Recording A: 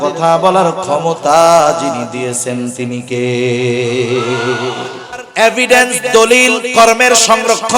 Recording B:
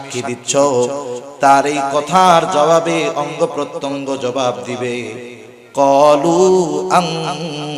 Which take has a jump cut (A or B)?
A